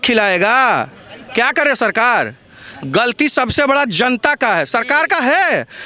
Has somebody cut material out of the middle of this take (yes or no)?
no